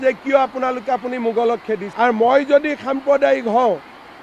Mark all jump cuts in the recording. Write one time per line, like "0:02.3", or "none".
0:01.9